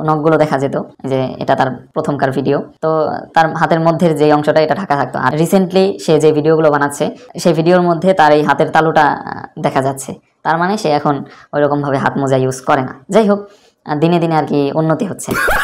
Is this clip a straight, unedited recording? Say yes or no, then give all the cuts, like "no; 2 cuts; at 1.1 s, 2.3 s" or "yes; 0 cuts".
yes; 0 cuts